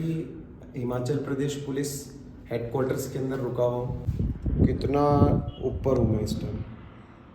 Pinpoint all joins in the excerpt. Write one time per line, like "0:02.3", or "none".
0:04.0